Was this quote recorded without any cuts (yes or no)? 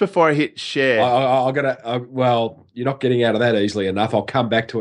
no